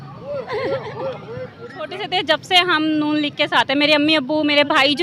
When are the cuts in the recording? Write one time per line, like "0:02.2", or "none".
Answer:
0:02.0